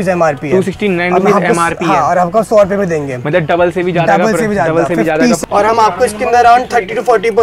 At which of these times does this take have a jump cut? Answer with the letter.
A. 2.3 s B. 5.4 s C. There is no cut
B